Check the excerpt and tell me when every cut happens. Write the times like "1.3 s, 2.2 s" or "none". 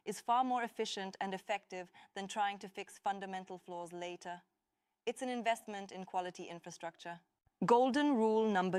none